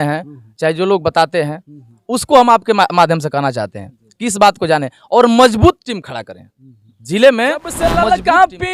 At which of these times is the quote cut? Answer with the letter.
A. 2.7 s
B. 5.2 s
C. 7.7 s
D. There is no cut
C